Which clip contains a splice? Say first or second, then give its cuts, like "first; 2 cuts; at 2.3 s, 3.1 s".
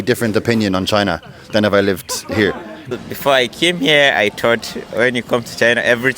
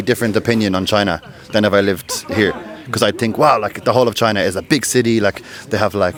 first; 1 cut; at 2.9 s